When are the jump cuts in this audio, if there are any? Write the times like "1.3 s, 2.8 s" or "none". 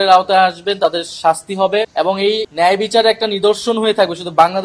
2.1 s